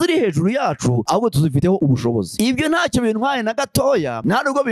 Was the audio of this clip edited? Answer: yes; 1 cut; at 2.3 s

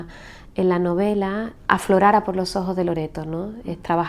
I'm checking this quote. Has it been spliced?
yes; 1 cut; at 1.5 s

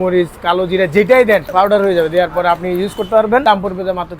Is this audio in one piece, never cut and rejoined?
no; 2 cuts; at 1.5 s, 3.4 s

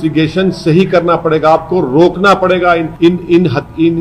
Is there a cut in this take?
yes; 1 cut; at 2.9 s

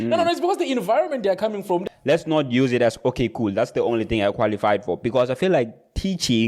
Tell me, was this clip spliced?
yes; 1 cut; at 1.8 s

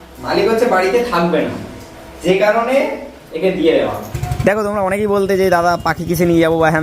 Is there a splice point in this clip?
yes; 1 cut; at 4.2 s

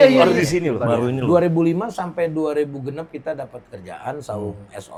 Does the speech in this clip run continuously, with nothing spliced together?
yes; 0 cuts

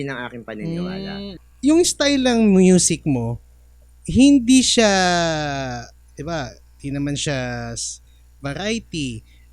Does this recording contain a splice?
yes; 1 cut; at 1.4 s

